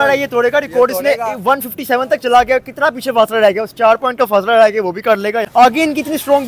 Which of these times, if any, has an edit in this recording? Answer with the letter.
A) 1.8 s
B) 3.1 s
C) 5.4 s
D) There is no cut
C